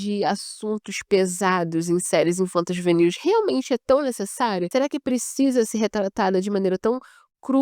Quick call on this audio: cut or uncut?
cut